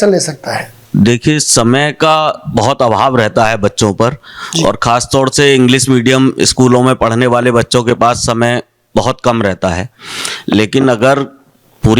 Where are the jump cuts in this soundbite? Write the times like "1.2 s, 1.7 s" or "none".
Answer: none